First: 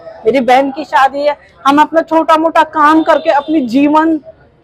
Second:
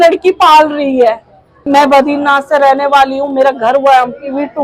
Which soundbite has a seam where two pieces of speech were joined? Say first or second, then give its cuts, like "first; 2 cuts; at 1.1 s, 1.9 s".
second; 1 cut; at 1.6 s